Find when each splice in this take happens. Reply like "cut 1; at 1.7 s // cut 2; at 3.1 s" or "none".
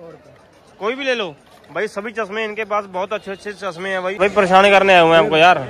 cut 1; at 4.2 s